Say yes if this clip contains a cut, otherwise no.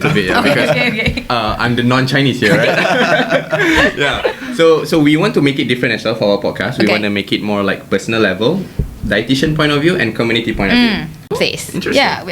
yes